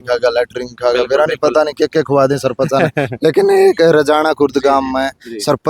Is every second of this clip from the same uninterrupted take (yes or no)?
yes